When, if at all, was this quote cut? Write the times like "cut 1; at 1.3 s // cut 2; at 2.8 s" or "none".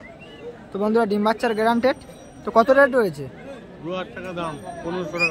none